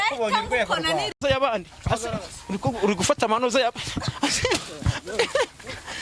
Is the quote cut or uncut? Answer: cut